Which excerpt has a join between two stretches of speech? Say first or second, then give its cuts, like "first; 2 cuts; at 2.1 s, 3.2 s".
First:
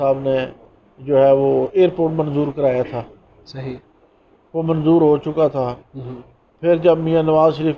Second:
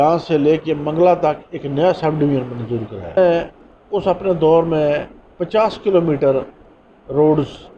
second; 1 cut; at 3.2 s